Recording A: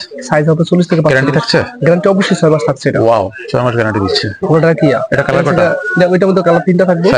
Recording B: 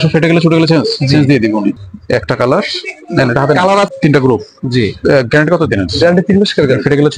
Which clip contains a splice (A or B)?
B